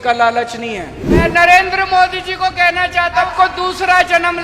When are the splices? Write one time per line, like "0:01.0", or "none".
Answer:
0:01.2
0:03.3